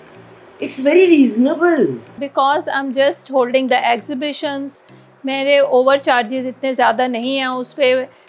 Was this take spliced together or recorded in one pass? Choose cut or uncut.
uncut